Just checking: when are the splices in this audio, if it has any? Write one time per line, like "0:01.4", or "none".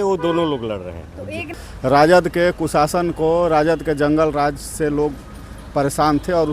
0:01.5